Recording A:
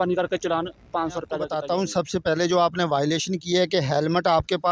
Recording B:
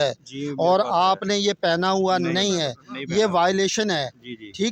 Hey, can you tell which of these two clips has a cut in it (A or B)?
A